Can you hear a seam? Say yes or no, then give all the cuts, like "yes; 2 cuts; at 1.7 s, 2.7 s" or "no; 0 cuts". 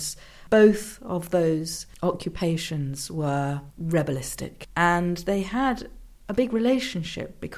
yes; 3 cuts; at 1.8 s, 3.7 s, 4.6 s